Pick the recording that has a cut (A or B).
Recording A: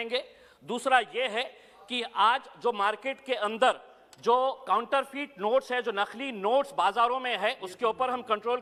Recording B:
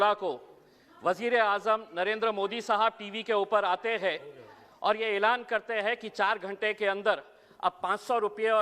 B